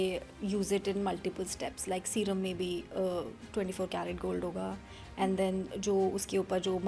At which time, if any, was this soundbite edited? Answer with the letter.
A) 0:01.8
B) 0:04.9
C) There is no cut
C